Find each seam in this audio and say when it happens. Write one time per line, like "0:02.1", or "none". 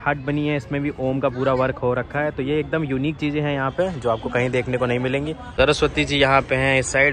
none